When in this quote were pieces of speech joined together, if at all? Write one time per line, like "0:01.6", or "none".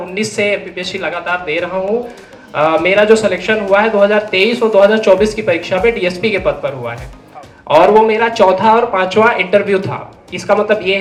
none

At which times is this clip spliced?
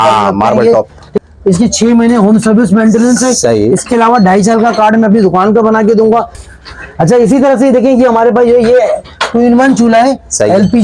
0:01.1
0:06.4

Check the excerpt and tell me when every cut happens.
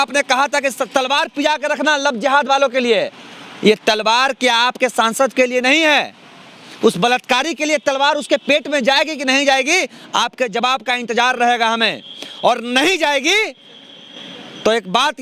none

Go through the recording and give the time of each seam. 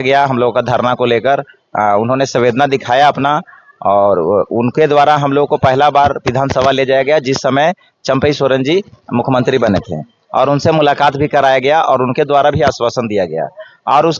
none

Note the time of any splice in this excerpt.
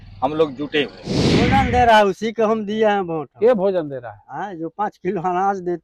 0:01.5

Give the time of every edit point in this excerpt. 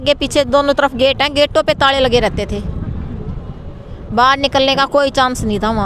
none

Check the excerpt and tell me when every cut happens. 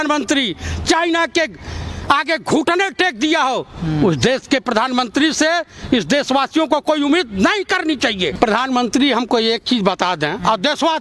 0:08.3

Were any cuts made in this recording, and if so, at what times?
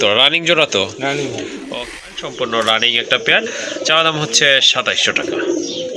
0:01.7

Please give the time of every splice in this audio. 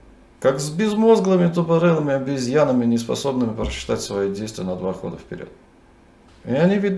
0:06.1

